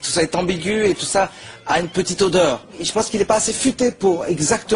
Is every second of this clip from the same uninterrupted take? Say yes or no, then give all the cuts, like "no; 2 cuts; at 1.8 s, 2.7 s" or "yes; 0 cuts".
no; 1 cut; at 2.7 s